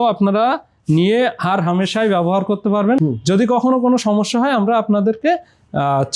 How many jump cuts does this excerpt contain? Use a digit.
1